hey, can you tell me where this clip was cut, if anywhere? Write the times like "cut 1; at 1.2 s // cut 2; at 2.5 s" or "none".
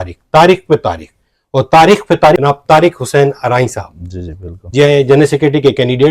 cut 1; at 2.4 s